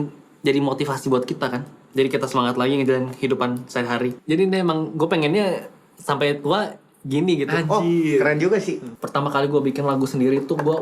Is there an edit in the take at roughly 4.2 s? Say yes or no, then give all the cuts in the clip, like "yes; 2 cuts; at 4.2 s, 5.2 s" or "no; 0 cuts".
yes; 2 cuts; at 4.2 s, 8.9 s